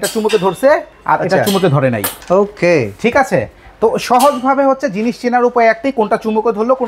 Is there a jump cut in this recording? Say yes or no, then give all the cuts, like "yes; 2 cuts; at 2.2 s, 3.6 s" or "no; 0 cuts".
yes; 2 cuts; at 0.9 s, 2.1 s